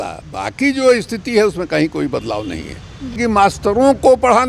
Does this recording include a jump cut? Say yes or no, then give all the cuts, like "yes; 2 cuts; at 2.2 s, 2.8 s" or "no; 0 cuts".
yes; 1 cut; at 3.2 s